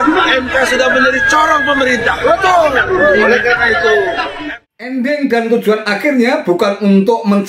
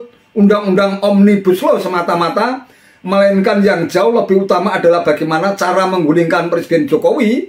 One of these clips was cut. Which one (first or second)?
first